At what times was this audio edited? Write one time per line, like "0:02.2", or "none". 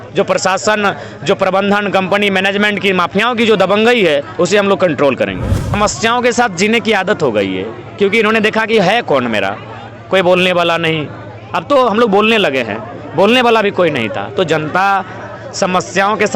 0:05.8